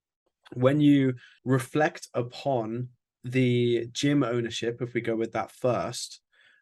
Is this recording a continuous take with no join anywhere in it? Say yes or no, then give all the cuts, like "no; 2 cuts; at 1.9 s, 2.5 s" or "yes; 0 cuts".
no; 1 cut; at 1.3 s